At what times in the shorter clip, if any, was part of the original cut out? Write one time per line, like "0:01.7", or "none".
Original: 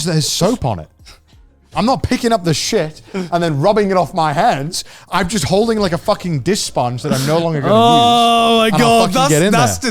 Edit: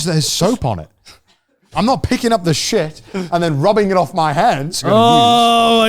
0:04.8